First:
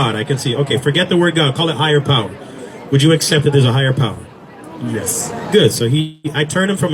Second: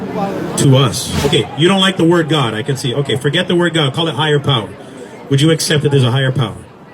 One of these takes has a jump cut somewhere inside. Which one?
second; 1 cut; at 1.2 s

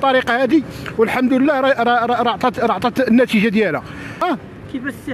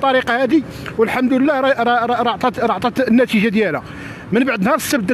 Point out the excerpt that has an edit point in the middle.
first; 1 cut; at 4.2 s

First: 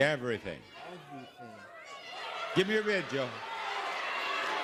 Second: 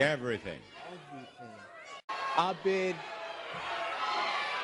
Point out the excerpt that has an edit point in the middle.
second; 1 cut; at 2.1 s

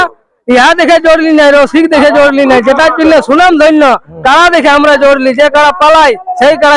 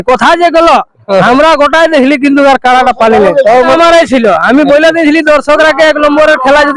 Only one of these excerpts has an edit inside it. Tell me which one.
second; 1 cut; at 3.7 s

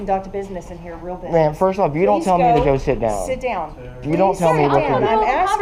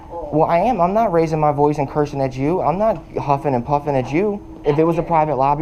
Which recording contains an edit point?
second; 1 cut; at 4.5 s

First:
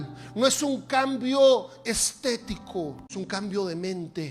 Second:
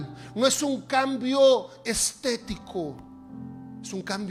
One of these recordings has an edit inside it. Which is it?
first; 1 cut; at 3.0 s

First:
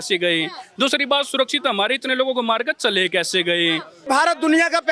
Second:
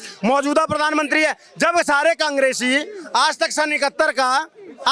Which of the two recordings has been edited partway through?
first; 1 cut; at 4.0 s

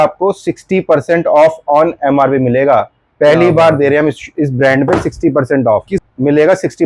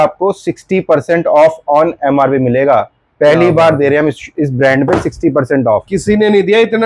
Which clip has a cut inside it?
first; 1 cut; at 6.0 s

